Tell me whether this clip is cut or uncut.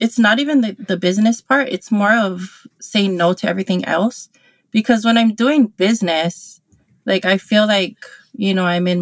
uncut